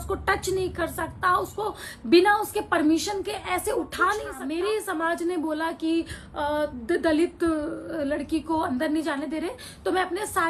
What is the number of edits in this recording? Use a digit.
1